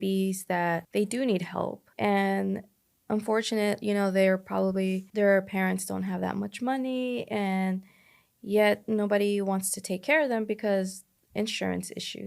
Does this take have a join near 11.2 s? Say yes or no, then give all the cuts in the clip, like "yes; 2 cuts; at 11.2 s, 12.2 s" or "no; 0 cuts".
no; 3 cuts; at 0.9 s, 1.8 s, 5.1 s